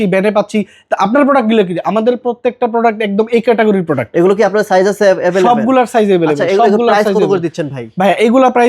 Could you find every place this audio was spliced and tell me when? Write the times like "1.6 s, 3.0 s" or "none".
none